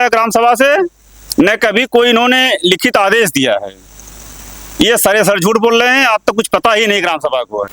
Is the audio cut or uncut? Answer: uncut